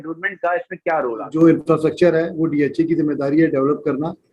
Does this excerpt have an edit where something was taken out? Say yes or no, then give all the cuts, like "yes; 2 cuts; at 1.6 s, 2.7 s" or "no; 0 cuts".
yes; 1 cut; at 1.3 s